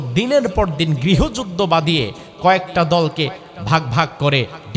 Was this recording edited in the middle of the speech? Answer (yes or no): no